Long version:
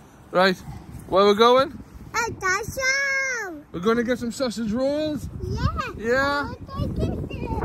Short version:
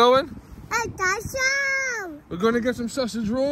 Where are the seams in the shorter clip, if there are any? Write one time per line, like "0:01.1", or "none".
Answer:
none